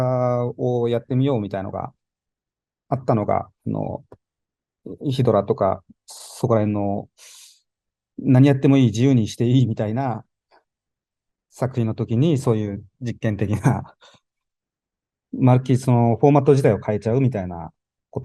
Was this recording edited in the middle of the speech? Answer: no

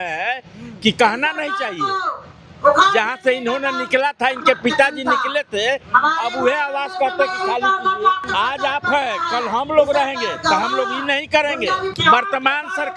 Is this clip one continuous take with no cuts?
no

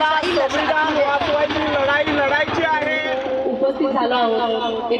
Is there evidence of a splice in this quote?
yes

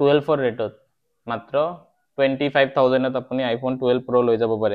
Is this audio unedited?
yes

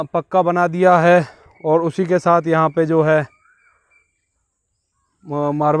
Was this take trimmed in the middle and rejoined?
no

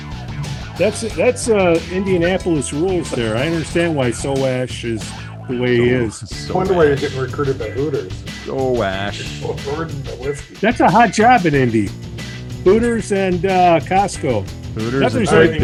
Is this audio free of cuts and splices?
yes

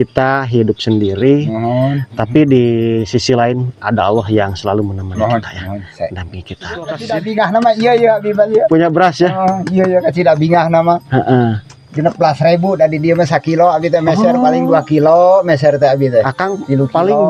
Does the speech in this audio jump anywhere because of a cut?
yes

